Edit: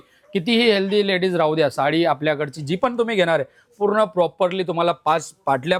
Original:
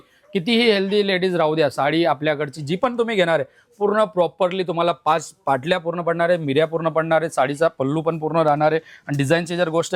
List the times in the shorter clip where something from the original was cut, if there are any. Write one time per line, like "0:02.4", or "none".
none